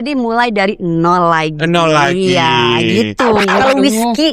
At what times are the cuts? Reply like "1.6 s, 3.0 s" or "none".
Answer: 3.4 s